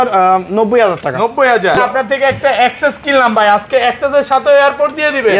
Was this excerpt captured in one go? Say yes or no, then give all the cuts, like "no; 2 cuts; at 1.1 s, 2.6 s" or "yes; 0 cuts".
no; 1 cut; at 1.8 s